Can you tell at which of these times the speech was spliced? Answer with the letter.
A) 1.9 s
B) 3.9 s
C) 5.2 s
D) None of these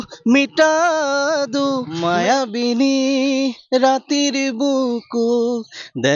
A